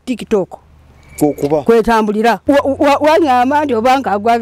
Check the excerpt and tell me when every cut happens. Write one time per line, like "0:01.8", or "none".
0:02.4